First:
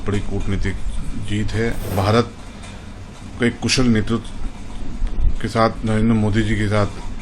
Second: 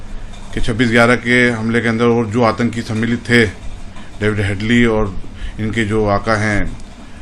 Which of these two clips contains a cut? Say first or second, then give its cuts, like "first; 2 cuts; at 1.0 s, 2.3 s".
first; 1 cut; at 1.9 s